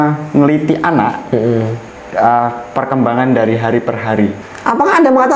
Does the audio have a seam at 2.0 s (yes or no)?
no